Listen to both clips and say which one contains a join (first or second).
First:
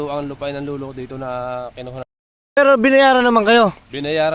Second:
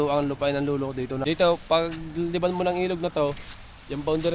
second